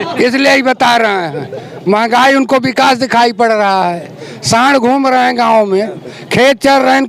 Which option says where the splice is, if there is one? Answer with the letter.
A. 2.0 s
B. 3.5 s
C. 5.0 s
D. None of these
D